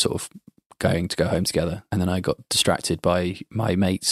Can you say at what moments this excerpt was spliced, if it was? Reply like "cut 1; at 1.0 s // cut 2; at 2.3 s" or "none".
cut 1; at 1.8 s